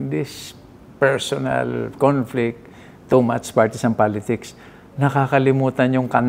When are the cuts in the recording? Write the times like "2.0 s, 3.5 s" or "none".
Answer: none